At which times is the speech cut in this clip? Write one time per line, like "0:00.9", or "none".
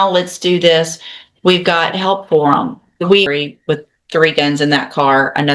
0:03.3